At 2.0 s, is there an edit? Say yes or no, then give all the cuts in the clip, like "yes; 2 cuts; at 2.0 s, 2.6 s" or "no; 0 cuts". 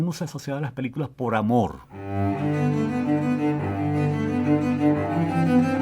yes; 1 cut; at 2.0 s